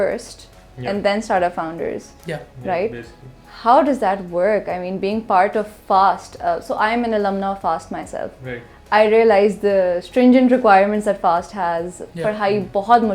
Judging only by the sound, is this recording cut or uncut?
uncut